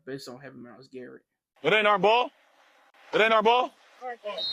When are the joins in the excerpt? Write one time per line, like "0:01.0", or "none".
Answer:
0:01.5